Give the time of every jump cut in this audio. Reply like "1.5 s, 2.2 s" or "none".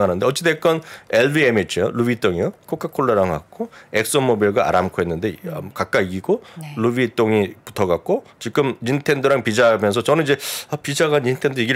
none